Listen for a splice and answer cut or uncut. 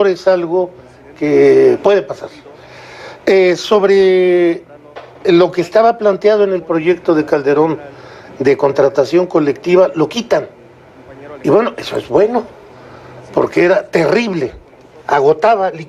uncut